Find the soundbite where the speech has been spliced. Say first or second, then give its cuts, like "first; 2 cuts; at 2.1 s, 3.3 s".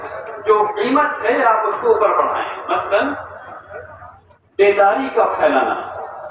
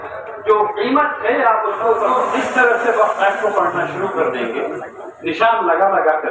second; 1 cut; at 2.2 s